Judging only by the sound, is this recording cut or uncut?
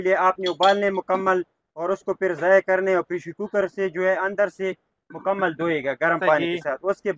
uncut